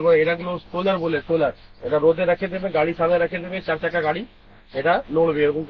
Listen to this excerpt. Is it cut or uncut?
uncut